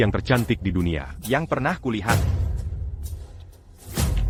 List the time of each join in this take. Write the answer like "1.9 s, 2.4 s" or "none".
none